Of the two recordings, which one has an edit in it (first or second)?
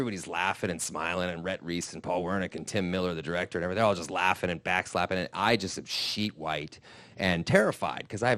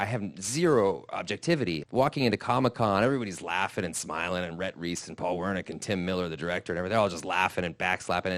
second